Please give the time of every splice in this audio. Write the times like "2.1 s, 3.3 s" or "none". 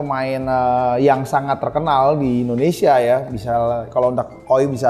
none

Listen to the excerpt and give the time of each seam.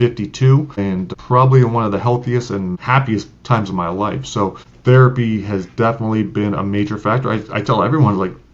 1.0 s, 2.8 s, 4.7 s

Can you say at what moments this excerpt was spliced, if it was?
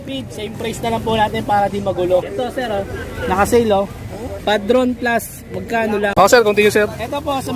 2.3 s, 6.1 s

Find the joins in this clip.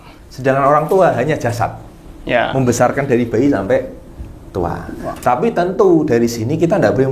none

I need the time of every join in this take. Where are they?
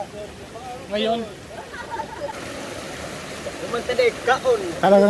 2.4 s

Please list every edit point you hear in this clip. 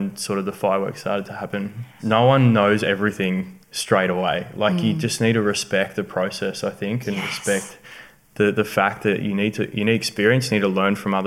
1.9 s

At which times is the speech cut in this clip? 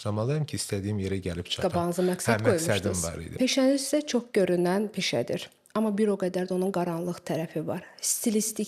3.3 s

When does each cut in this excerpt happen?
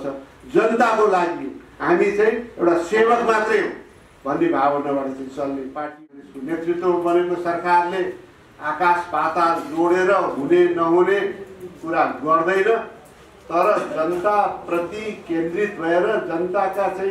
6.2 s

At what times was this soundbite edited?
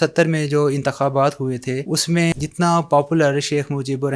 2.3 s

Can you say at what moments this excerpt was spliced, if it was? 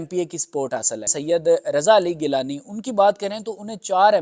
1.1 s

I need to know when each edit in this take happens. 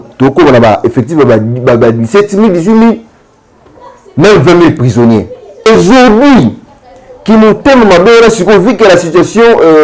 5.7 s

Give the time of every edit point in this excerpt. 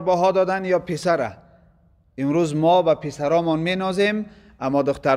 none

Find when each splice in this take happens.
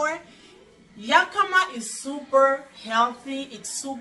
none

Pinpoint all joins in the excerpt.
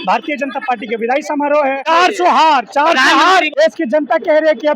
1.8 s, 3.5 s

